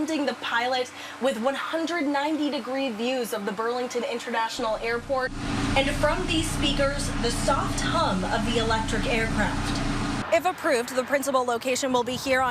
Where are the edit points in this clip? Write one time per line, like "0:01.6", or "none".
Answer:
0:10.2

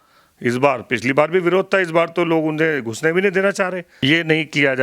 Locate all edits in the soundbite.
0:03.9

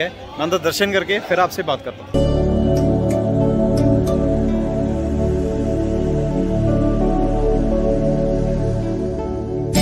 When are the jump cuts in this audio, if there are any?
none

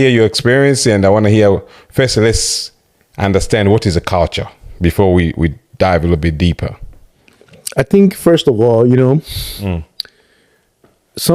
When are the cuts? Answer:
none

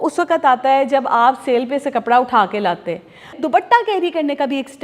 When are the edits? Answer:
0:03.4

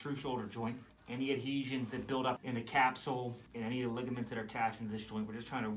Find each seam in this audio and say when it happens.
0:00.9
0:02.4
0:03.4

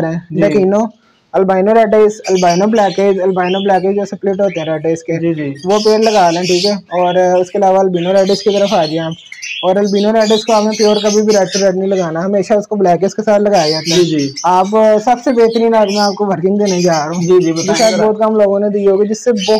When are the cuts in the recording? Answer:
none

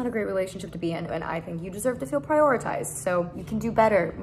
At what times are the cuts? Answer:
0:01.1
0:03.4

